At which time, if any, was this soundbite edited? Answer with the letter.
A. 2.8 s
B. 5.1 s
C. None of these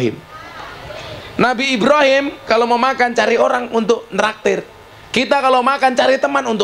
C